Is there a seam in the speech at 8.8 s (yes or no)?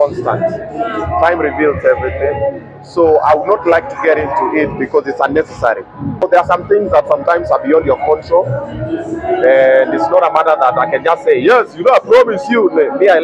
no